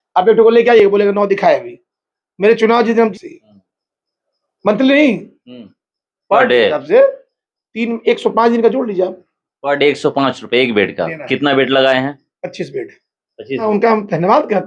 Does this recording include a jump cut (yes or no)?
yes